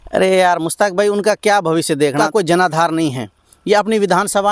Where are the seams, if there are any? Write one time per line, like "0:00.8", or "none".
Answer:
0:02.2